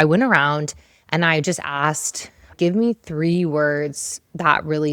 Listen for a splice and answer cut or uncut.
cut